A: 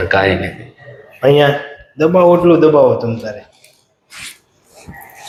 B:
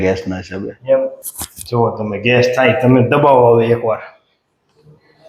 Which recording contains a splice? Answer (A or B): B